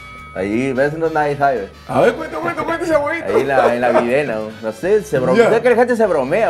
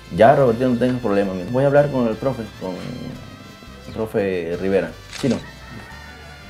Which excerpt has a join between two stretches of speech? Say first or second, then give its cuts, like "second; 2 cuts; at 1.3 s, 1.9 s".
second; 1 cut; at 1.5 s